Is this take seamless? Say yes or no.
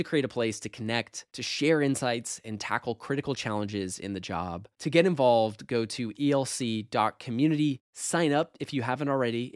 yes